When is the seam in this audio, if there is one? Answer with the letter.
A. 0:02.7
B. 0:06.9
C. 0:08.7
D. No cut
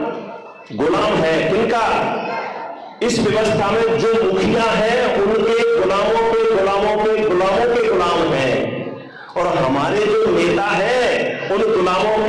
D